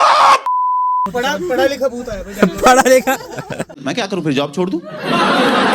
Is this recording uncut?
no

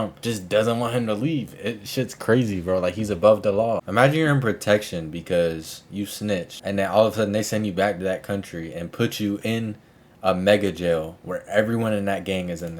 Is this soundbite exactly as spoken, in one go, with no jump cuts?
no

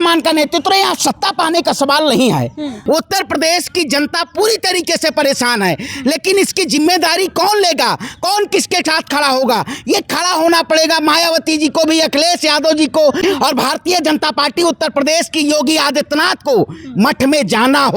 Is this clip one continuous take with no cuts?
no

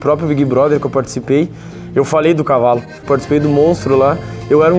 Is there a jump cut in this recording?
yes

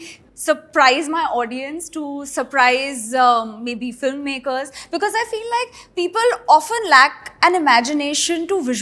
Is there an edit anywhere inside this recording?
no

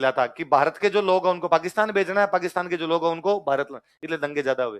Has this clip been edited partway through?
no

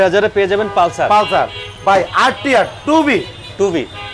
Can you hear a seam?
no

